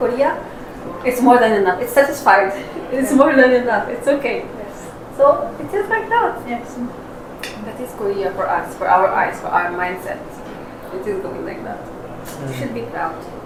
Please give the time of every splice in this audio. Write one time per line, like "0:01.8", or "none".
none